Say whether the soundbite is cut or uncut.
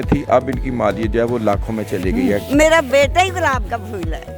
cut